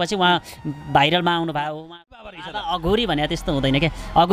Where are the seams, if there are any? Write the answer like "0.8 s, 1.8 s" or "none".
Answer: 2.4 s